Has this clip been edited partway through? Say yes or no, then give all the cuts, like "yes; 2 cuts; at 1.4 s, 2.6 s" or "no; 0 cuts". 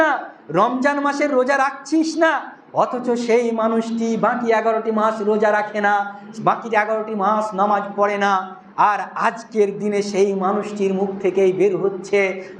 no; 0 cuts